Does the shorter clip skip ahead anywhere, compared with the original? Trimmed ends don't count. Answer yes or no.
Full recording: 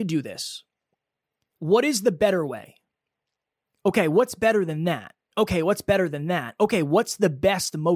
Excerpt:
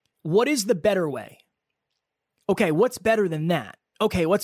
no